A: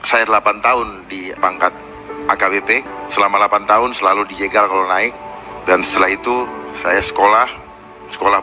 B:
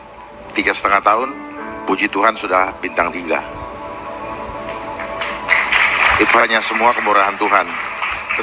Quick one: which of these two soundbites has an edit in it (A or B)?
A